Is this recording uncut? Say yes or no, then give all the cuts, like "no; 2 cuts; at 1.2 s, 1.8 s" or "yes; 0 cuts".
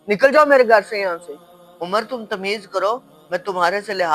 yes; 0 cuts